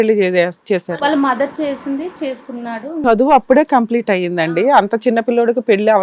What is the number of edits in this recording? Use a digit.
1